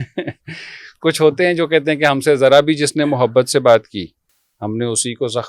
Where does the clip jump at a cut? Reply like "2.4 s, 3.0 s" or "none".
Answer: none